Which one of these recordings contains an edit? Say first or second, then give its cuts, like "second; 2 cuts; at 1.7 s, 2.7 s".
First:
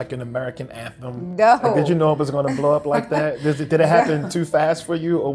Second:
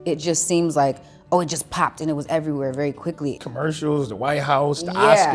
second; 1 cut; at 3.4 s